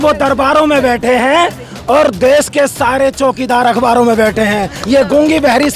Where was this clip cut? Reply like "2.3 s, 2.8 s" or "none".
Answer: 4.7 s

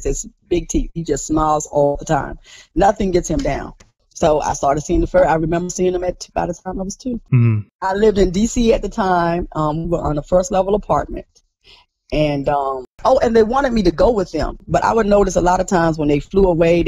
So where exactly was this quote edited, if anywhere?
13.0 s, 14.6 s

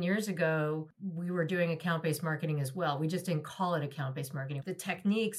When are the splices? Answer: 1.0 s, 4.5 s

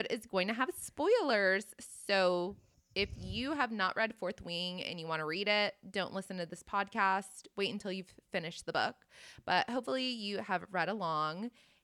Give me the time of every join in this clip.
none

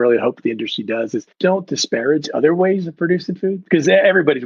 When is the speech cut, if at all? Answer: 1.3 s

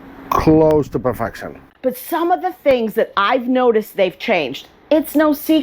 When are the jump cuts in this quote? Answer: 1.6 s

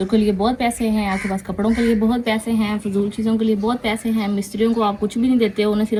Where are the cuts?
none

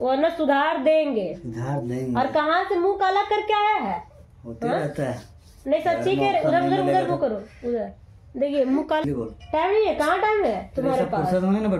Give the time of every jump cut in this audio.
9.0 s

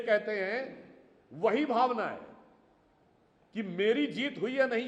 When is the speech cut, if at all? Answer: none

